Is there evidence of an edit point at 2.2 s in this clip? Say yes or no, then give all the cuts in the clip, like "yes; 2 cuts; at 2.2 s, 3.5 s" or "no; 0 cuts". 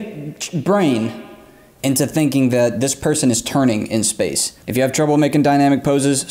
no; 1 cut; at 4.5 s